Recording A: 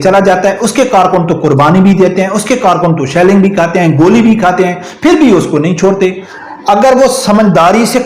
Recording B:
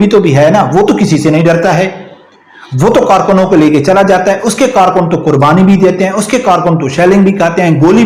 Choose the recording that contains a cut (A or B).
A